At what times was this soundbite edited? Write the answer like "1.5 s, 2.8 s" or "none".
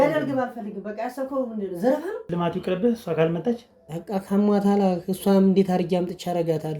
2.3 s

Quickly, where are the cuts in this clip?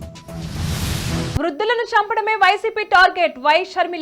1.4 s

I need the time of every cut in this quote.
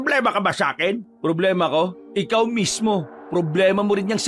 1.1 s, 2.0 s, 3.2 s

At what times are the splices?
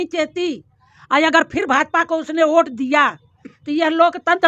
none

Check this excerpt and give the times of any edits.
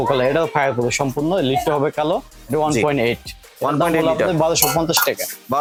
none

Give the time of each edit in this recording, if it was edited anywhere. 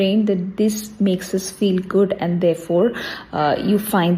none

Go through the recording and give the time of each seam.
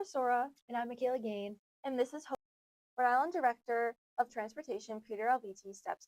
2.3 s

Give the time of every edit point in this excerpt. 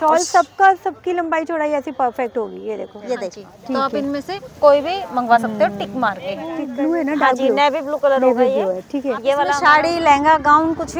3.5 s, 6.6 s, 9.5 s

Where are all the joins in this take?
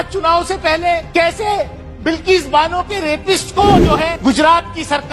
1.1 s, 4.2 s

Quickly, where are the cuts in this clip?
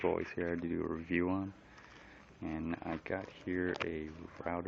none

